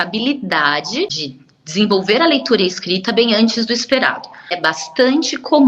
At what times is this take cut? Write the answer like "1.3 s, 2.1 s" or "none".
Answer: 1.1 s, 4.6 s